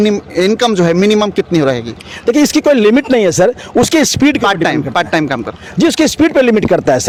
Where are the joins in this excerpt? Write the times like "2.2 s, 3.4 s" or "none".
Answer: none